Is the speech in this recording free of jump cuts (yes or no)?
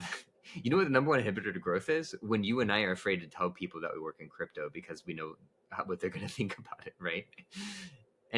yes